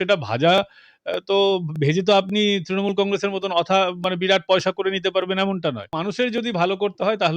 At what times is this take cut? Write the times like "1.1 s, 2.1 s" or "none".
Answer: 6.0 s